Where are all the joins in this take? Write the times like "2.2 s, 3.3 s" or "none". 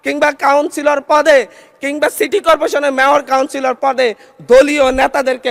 none